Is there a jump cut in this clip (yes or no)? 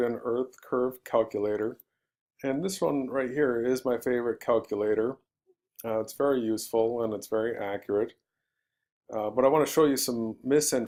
no